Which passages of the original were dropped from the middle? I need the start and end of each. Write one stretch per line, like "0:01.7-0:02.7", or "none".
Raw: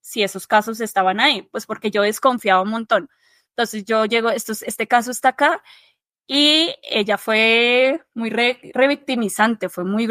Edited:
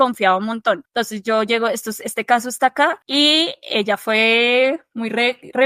0:03.1-0:03.5
0:05.6-0:06.2